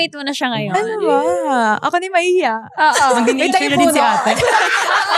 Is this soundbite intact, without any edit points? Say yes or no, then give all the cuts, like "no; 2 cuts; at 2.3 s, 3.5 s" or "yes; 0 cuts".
yes; 0 cuts